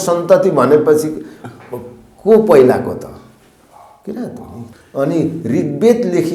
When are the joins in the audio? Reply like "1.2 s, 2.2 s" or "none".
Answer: 4.7 s